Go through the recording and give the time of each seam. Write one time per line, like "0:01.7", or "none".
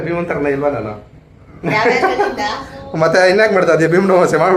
none